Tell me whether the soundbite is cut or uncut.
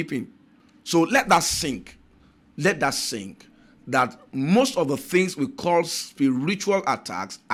uncut